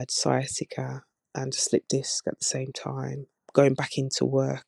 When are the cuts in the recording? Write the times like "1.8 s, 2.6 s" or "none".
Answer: none